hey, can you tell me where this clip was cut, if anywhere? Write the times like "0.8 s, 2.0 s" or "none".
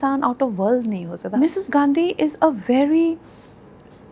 1.3 s

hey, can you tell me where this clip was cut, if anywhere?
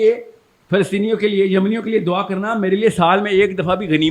none

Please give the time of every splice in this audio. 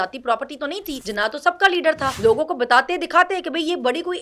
1.0 s, 2.1 s

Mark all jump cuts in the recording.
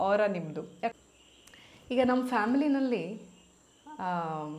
0.9 s

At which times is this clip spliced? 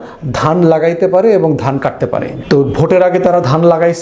2.3 s

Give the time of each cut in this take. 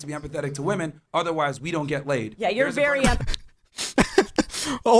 none

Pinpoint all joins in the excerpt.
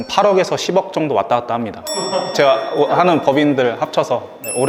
1.8 s

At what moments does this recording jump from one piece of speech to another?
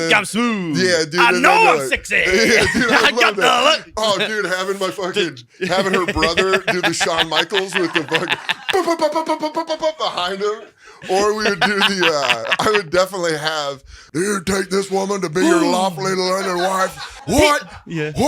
14.0 s, 17.1 s

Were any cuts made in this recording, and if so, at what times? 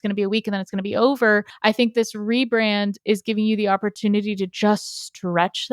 1.5 s

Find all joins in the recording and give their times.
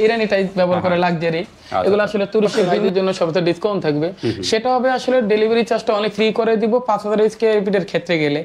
2.7 s

